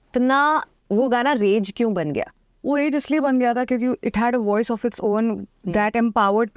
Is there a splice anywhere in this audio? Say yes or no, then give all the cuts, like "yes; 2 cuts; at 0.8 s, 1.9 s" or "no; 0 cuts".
no; 0 cuts